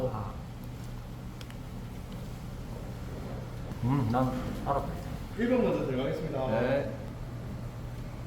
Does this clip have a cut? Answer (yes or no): yes